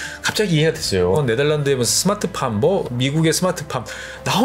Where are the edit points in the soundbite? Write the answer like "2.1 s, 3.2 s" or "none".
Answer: 1.2 s